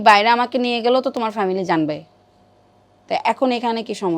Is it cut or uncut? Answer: uncut